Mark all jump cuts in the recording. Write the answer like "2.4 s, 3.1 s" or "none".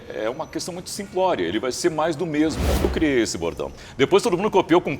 2.9 s